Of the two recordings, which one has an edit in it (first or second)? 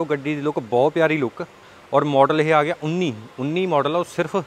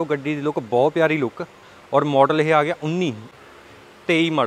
second